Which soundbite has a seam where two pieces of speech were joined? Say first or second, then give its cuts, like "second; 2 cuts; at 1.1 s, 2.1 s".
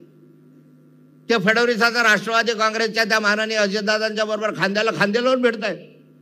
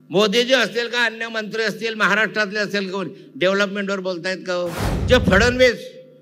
second; 1 cut; at 4.9 s